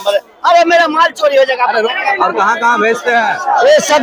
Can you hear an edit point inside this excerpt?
yes; 1 cut; at 1.9 s

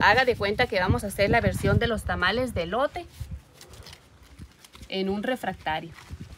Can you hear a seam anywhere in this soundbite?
no; 0 cuts

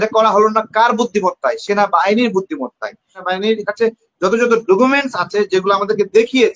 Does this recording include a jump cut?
yes; 1 cut; at 3.2 s

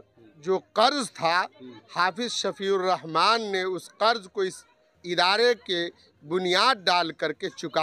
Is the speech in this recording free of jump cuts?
yes; 0 cuts

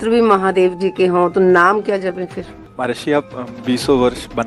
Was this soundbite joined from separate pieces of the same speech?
yes; 1 cut; at 2.6 s

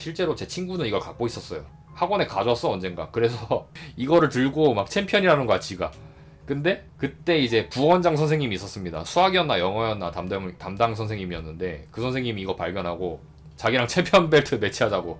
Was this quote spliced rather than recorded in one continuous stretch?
yes; 1 cut; at 1.6 s

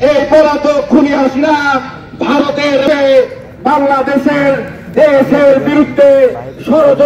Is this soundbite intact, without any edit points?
yes; 0 cuts

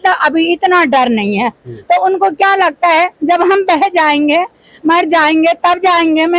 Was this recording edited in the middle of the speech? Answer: no; 0 cuts

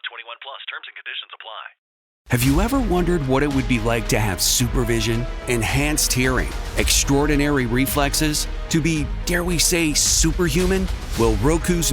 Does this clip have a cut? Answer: yes; 1 cut; at 2.0 s

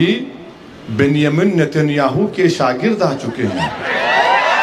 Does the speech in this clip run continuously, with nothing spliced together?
yes; 0 cuts

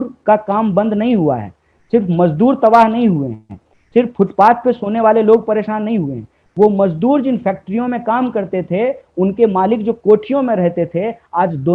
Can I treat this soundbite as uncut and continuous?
yes; 0 cuts

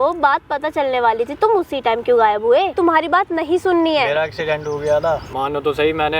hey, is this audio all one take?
no; 2 cuts; at 2.7 s, 5.3 s

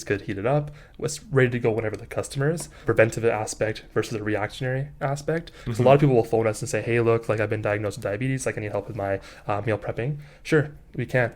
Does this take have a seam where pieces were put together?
yes; 1 cut; at 2.7 s

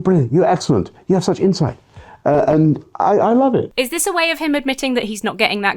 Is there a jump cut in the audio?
yes; 1 cut; at 3.7 s

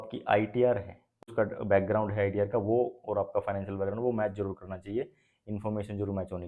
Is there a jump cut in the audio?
yes; 1 cut; at 1.3 s

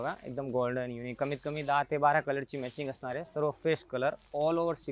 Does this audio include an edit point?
no; 0 cuts

